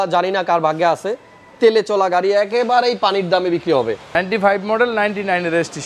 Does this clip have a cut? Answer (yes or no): yes